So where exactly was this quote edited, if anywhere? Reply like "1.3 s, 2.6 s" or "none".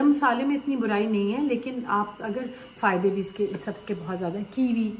2.7 s